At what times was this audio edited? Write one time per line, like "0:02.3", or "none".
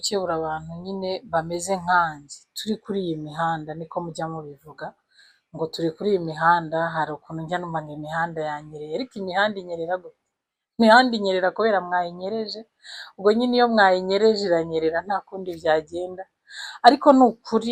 none